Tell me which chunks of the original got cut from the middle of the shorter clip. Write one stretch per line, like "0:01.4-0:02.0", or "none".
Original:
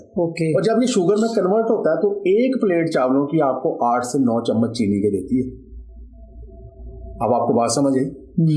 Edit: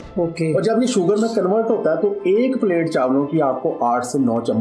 none